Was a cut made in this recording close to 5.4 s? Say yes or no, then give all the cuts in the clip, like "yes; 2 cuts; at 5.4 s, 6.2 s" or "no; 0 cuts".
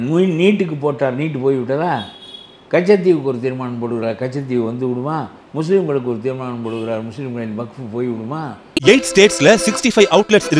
no; 0 cuts